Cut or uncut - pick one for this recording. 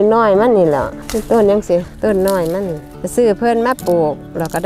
uncut